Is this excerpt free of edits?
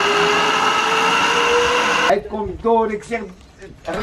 no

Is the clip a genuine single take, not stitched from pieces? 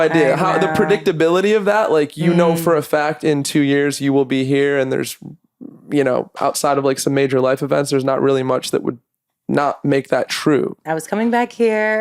no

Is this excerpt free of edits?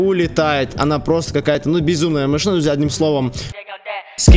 yes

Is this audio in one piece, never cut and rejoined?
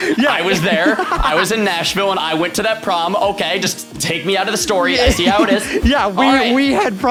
yes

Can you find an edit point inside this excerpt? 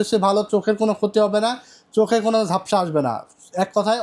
no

